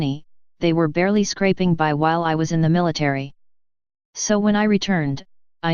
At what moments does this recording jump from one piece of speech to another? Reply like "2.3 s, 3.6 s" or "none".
4.0 s